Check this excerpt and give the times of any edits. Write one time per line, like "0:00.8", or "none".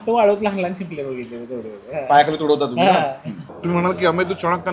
0:03.4